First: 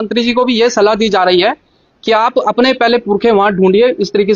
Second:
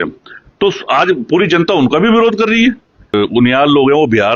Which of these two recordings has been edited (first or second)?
second